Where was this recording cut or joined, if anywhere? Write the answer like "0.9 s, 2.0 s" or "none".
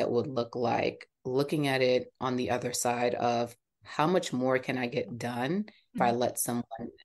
6.0 s